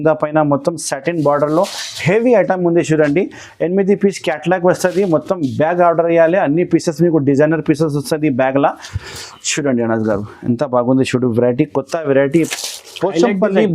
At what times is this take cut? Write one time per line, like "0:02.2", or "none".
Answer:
0:12.5

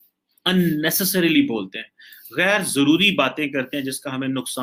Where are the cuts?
none

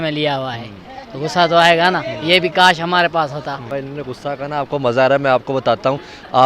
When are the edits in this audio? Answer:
0:03.7

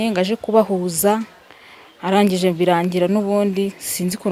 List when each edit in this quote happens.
none

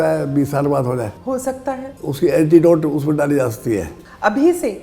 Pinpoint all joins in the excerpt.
0:01.4

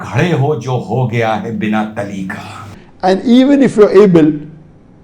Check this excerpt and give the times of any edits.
0:02.6

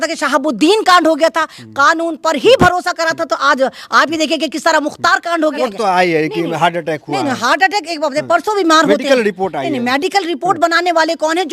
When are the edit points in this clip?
0:05.6

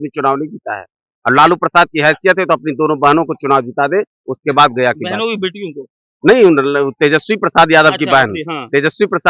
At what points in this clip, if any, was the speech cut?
none

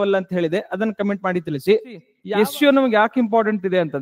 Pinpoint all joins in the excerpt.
0:02.1

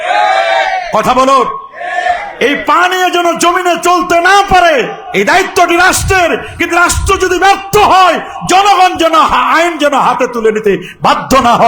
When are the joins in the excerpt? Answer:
0:02.3

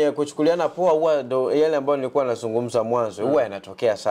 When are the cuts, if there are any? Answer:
none

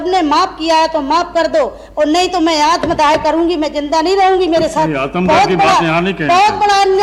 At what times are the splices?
none

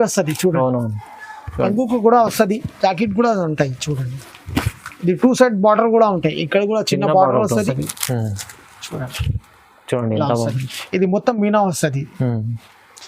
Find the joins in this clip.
0:07.7

